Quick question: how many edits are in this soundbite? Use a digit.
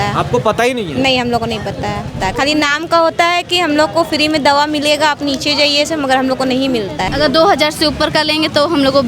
2